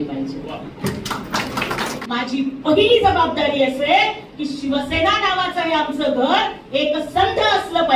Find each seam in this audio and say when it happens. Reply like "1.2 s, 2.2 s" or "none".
2.0 s